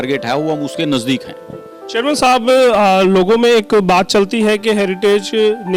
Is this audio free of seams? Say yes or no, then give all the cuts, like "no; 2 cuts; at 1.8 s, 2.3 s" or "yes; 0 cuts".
yes; 0 cuts